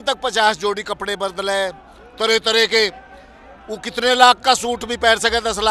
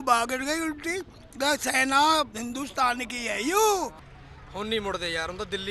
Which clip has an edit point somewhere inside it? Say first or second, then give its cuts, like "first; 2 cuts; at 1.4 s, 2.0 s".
second; 1 cut; at 4.1 s